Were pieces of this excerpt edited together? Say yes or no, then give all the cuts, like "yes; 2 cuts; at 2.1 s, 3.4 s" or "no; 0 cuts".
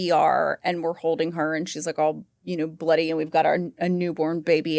no; 0 cuts